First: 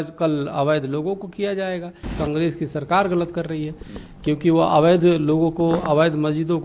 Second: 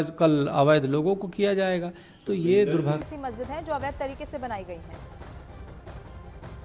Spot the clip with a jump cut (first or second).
first